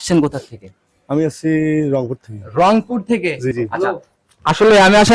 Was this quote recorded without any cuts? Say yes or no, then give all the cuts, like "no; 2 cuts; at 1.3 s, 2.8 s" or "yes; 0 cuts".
no; 1 cut; at 3.5 s